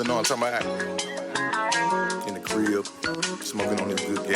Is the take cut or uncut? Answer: uncut